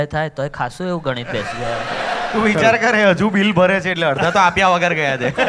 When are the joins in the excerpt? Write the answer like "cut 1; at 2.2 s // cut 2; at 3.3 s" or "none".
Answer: none